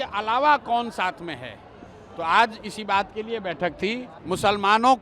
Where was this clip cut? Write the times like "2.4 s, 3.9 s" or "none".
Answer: 4.1 s